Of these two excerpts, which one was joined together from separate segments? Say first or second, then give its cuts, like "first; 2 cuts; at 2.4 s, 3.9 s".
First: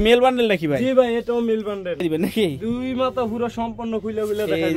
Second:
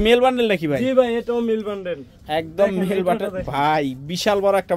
first; 1 cut; at 2.0 s